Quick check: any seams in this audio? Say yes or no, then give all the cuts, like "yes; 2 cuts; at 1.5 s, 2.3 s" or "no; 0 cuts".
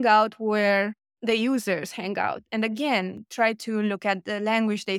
no; 0 cuts